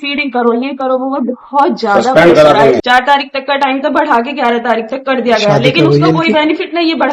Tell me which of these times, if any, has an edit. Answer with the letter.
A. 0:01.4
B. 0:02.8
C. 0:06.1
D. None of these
B